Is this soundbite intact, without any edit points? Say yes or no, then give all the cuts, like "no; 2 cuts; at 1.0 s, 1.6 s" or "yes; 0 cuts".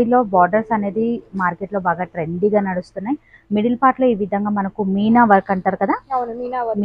yes; 0 cuts